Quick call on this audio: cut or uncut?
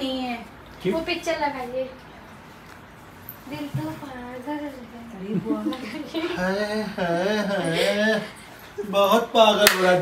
uncut